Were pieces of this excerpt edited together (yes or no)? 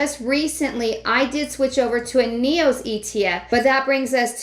yes